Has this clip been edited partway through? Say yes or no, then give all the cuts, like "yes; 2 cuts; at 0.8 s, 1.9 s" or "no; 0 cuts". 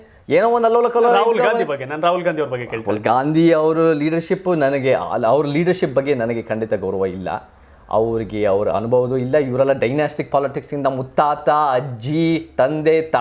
no; 0 cuts